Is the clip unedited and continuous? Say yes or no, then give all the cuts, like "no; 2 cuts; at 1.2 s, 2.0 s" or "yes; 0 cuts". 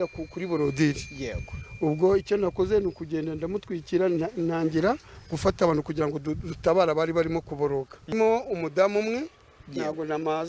no; 1 cut; at 8.1 s